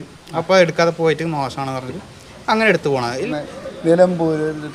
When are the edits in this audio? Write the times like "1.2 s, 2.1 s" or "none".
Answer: 3.3 s